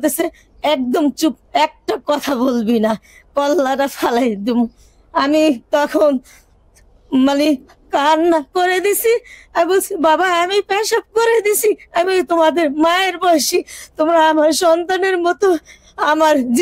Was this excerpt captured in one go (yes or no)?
yes